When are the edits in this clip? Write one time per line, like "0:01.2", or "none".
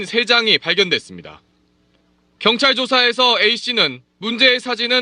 0:02.6